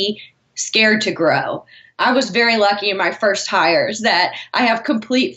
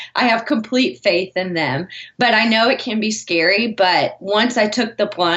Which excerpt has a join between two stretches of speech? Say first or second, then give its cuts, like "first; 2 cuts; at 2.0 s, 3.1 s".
first; 1 cut; at 1.8 s